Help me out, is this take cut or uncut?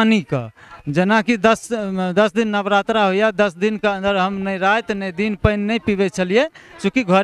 uncut